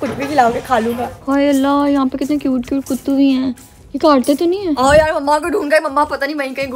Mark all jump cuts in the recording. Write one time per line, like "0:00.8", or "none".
0:01.1
0:04.8